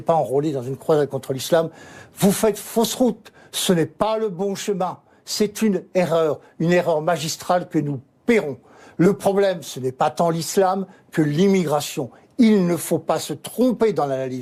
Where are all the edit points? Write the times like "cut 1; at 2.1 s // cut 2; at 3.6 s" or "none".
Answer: none